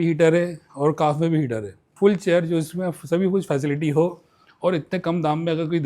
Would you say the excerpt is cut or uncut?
cut